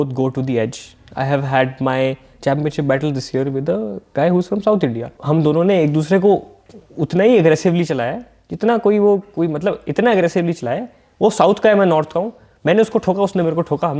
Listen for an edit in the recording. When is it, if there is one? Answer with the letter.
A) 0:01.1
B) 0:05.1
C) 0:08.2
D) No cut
B